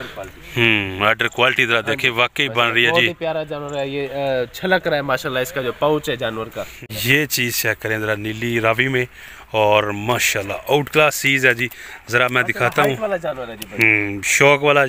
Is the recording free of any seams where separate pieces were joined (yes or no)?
no